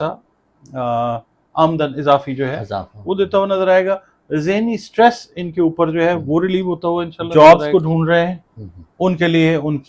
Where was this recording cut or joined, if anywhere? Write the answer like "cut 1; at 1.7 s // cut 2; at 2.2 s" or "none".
cut 1; at 7.1 s